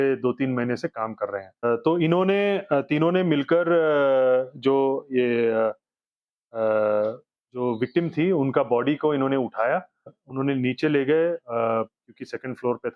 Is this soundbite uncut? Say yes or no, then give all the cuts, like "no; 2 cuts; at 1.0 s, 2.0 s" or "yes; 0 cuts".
no; 2 cuts; at 1.6 s, 10.2 s